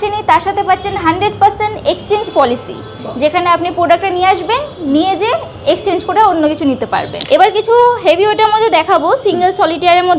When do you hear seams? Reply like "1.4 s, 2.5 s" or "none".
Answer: none